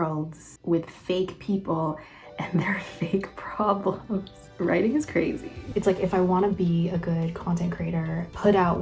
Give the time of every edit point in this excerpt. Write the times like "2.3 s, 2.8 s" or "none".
4.4 s, 5.7 s